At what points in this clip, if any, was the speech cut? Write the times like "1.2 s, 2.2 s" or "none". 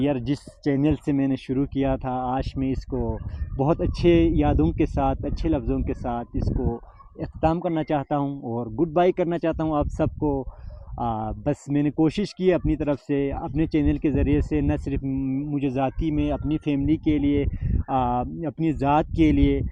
none